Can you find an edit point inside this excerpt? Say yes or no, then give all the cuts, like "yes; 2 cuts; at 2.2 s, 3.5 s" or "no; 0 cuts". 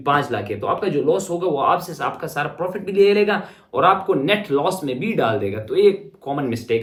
no; 0 cuts